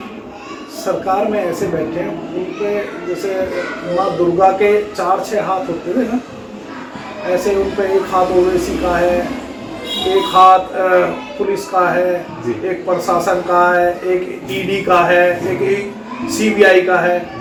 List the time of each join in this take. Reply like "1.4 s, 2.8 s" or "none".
none